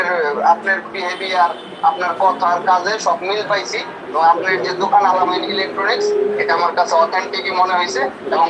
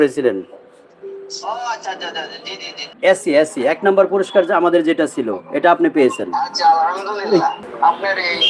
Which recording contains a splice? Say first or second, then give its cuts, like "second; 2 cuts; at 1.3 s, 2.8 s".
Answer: second; 2 cuts; at 2.8 s, 7.6 s